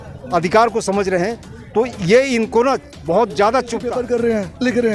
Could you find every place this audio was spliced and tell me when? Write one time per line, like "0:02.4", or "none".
0:03.9